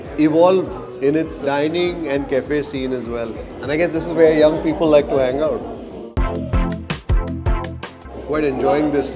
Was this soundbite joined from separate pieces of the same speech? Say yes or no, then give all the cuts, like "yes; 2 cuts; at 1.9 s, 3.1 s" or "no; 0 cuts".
yes; 2 cuts; at 6.1 s, 8.1 s